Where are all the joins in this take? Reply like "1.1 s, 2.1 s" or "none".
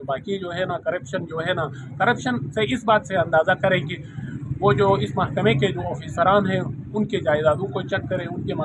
none

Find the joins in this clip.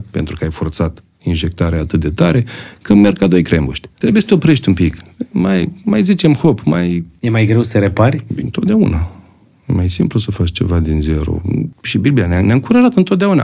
3.8 s, 7.1 s, 11.8 s

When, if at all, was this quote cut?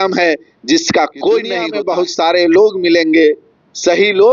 1.7 s

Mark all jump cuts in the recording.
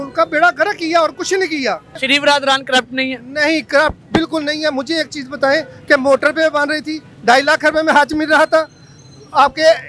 2.0 s

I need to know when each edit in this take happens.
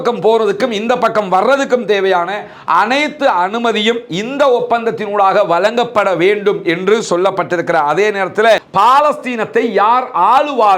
8.7 s

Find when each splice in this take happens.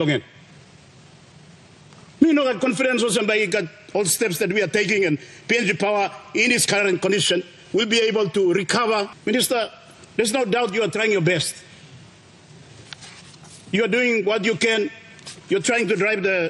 none

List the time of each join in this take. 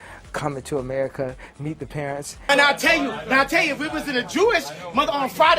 2.3 s

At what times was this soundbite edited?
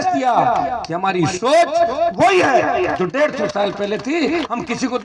none

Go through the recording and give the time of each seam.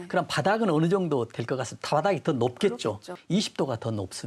3.1 s

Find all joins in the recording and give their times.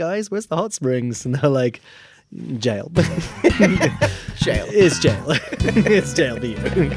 none

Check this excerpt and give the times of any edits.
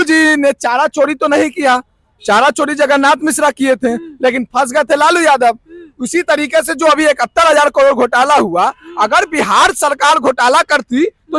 none

